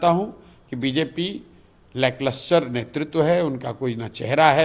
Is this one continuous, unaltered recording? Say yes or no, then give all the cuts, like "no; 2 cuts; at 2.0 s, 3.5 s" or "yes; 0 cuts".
yes; 0 cuts